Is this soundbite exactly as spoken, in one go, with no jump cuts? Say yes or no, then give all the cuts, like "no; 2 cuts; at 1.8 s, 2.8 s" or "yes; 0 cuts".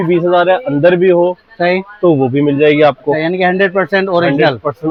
yes; 0 cuts